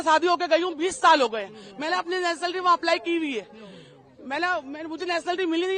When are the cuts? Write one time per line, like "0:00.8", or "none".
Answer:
none